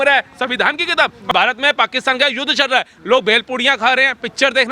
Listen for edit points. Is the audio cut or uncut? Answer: cut